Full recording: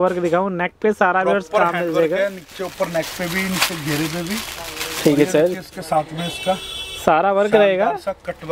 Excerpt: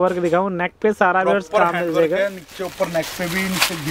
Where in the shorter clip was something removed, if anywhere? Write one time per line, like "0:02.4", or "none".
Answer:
none